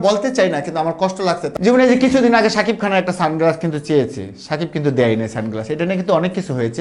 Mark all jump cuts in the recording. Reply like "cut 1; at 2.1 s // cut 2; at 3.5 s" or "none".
cut 1; at 1.5 s